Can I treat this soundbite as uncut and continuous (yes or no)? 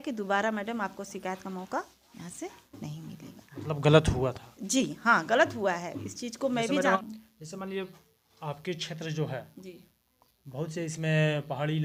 yes